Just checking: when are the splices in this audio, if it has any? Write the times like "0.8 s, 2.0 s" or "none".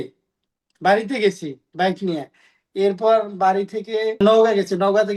4.2 s